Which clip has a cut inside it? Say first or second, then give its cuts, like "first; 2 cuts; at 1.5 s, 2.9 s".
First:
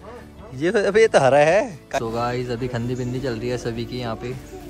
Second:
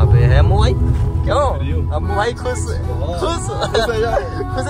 first; 1 cut; at 2.0 s